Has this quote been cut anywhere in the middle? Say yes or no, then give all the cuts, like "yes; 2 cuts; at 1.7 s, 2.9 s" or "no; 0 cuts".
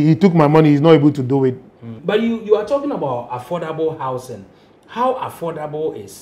yes; 1 cut; at 1.9 s